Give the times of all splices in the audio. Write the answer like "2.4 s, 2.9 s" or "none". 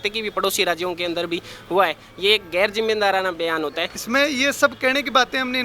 3.9 s